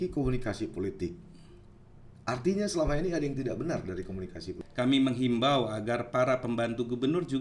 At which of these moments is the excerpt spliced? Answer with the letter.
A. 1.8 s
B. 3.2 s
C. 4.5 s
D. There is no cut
C